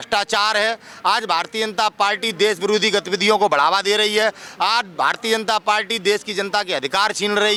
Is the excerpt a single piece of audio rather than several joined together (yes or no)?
yes